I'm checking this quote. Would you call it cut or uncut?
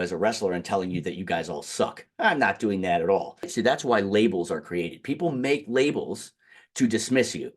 cut